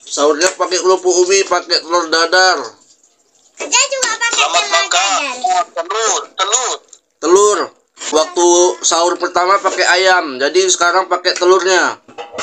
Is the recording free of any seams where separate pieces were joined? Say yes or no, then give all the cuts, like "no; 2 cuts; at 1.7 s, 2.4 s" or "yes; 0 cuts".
no; 1 cut; at 8.0 s